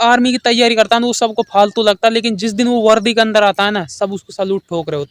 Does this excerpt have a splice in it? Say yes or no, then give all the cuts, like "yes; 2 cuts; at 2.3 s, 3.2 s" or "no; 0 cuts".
no; 0 cuts